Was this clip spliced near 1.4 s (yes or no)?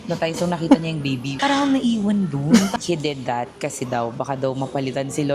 yes